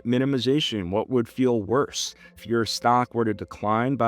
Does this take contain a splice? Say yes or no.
yes